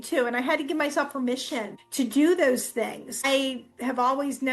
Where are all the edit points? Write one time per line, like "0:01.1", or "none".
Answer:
0:01.8
0:03.2